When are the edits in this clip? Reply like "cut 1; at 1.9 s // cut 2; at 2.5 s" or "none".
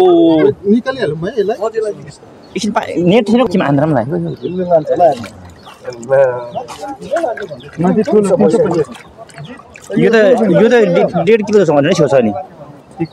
cut 1; at 3.5 s